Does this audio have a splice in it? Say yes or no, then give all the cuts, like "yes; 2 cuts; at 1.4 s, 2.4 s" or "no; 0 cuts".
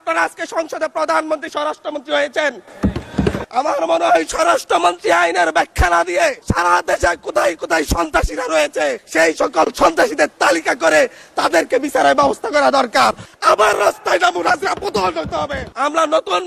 yes; 5 cuts; at 3.5 s, 6.4 s, 9.0 s, 13.3 s, 15.7 s